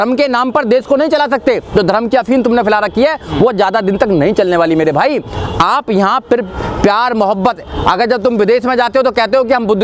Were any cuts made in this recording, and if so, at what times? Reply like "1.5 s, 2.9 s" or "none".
none